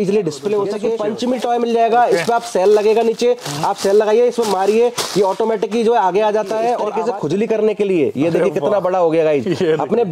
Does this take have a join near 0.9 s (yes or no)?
yes